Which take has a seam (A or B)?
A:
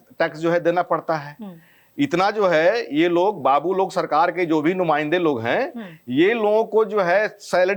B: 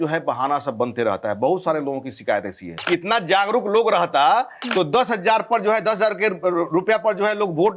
B